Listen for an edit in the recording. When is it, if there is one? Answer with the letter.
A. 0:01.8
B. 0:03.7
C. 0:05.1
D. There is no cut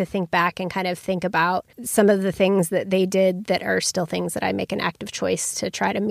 A